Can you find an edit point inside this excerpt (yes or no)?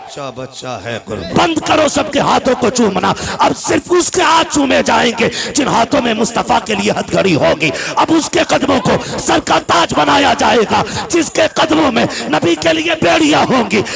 yes